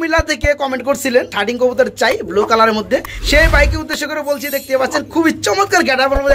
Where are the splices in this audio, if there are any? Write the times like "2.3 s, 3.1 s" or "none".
1.3 s, 3.2 s